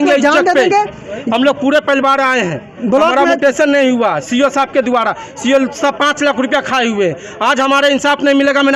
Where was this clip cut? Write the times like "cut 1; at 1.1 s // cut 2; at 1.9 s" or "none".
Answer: none